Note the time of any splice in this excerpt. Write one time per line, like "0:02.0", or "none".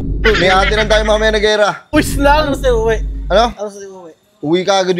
0:01.9